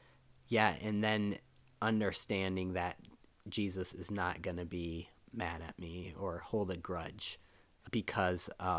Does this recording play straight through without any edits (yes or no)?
no